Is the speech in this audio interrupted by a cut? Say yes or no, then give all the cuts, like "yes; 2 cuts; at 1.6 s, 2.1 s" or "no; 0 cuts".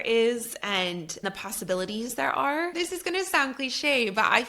yes; 1 cut; at 2.7 s